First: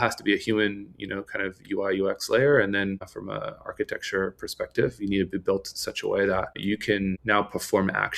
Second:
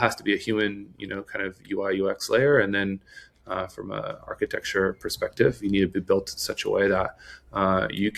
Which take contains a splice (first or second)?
first